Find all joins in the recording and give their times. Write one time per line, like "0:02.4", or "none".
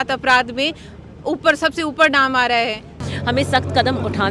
0:03.0